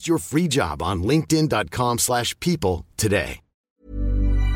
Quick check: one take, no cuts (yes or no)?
no